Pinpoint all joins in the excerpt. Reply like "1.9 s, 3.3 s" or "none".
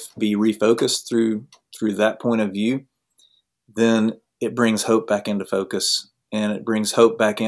none